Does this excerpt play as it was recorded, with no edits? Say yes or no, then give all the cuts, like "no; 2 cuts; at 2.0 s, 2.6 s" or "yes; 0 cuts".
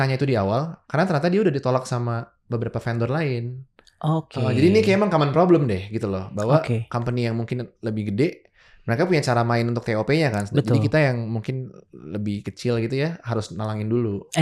yes; 0 cuts